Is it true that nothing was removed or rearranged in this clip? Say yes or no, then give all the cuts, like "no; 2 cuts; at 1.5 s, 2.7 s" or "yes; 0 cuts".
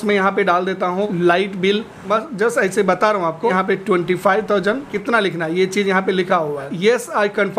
no; 5 cuts; at 1.1 s, 2.0 s, 3.5 s, 4.9 s, 6.7 s